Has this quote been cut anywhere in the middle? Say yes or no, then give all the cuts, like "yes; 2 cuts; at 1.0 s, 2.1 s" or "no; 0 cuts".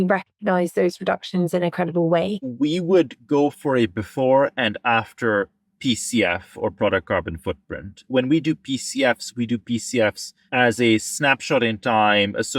yes; 3 cuts; at 2.5 s, 8.0 s, 10.3 s